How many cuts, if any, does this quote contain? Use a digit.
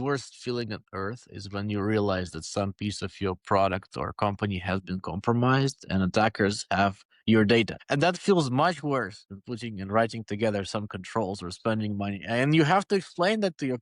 1